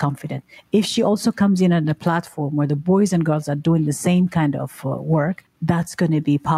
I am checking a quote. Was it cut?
yes; 1 cut; at 5.4 s

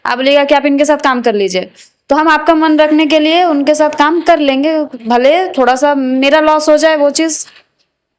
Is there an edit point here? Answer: no; 0 cuts

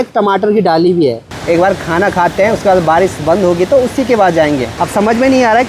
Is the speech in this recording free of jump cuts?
no; 2 cuts; at 1.3 s, 4.7 s

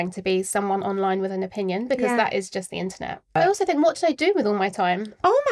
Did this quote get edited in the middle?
yes; 1 cut; at 3.3 s

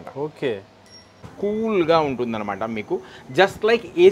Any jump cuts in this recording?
yes; 1 cut; at 1.1 s

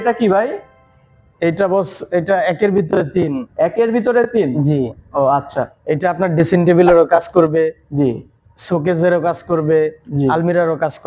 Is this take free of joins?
yes; 0 cuts

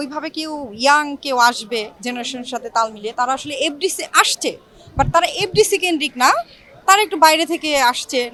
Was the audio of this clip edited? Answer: no; 0 cuts

